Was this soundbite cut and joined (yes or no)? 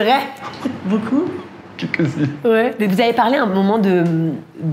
no